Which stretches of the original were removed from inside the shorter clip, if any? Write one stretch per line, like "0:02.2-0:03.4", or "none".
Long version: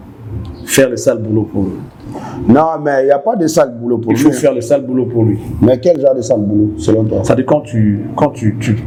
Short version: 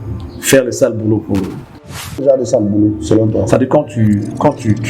0:02.4-0:06.0